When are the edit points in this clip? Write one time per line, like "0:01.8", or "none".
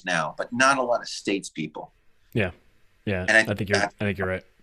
none